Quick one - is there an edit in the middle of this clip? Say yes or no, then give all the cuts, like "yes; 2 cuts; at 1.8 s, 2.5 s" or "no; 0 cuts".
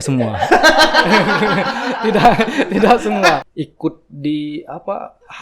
yes; 1 cut; at 3.4 s